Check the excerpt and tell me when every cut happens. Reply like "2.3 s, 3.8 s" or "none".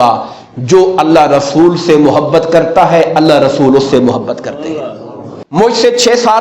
5.3 s